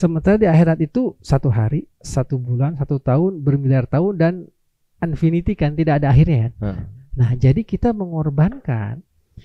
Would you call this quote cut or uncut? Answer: uncut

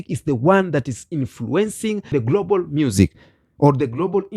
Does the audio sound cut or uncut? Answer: cut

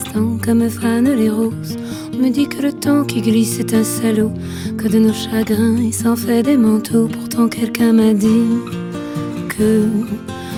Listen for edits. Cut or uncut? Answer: uncut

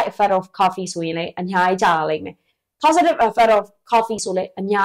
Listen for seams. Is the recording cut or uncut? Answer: uncut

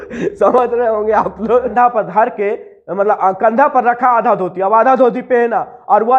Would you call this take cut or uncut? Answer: cut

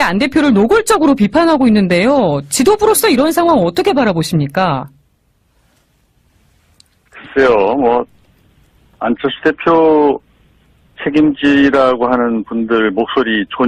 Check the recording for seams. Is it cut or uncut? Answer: uncut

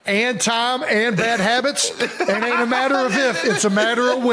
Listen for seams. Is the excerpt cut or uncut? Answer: uncut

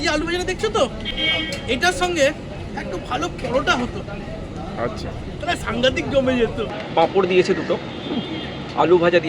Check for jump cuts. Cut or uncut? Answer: cut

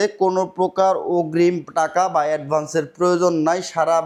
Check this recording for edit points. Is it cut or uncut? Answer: uncut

